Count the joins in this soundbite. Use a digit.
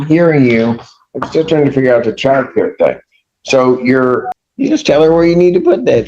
1